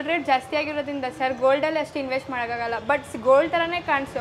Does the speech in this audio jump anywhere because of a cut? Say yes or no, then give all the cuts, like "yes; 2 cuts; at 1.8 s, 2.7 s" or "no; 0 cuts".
no; 0 cuts